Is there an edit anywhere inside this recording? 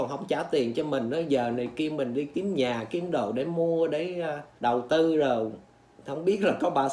no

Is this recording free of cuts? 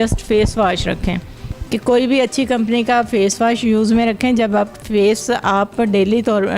yes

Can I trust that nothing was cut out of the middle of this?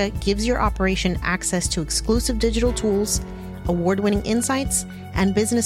yes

